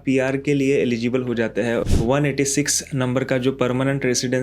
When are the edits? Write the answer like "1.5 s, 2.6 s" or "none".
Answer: 1.8 s